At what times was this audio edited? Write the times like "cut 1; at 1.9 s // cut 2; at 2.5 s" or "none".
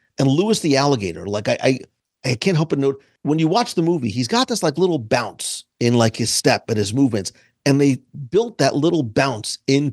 cut 1; at 3.1 s